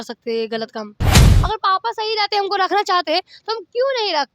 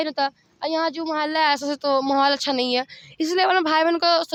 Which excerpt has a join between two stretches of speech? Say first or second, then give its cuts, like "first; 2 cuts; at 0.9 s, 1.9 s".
first; 1 cut; at 1.2 s